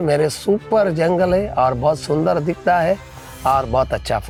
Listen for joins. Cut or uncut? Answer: uncut